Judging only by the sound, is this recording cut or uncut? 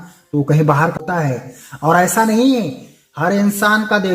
cut